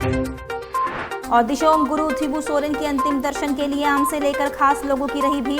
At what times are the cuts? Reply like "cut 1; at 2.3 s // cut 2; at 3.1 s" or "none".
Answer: none